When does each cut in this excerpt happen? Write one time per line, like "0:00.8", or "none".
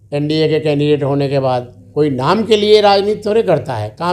0:01.8